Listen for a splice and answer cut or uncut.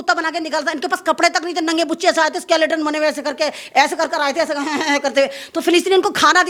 uncut